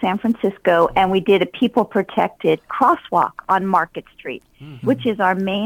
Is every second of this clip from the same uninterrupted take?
yes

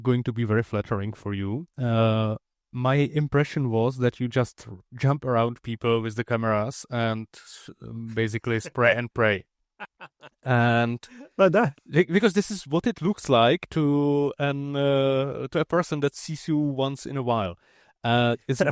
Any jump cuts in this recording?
no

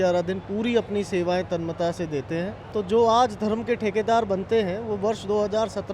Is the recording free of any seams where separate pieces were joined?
no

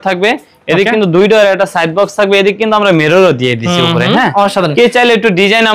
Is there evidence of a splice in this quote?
no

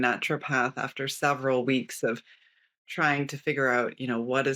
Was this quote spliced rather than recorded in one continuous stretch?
no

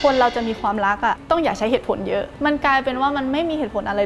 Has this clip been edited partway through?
yes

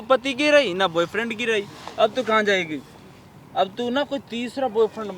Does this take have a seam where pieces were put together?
no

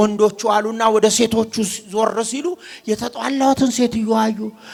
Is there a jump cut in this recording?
no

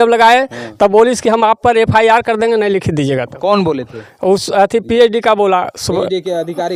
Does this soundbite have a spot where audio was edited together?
no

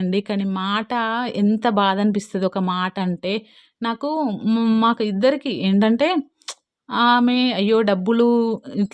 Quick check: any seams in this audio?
no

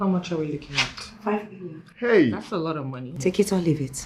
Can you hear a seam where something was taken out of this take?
no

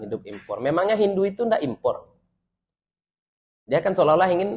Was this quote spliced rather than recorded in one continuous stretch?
no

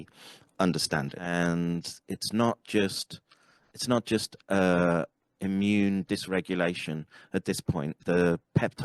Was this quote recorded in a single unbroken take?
no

